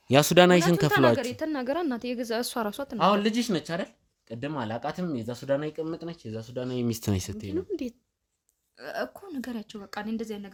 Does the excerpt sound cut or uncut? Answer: uncut